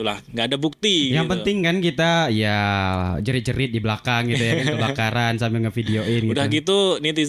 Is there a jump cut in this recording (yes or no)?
no